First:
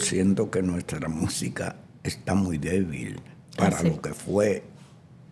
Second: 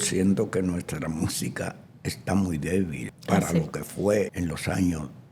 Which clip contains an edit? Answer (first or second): second